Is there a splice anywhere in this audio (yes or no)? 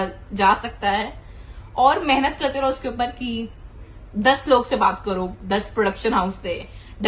no